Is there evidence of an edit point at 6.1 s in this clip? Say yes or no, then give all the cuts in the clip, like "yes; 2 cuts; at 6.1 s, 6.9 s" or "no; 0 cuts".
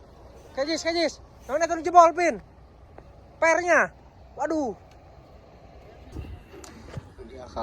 yes; 1 cut; at 6.1 s